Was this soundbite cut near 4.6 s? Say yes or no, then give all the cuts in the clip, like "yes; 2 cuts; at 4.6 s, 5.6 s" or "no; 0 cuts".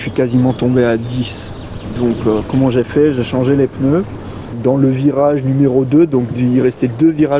yes; 1 cut; at 4.6 s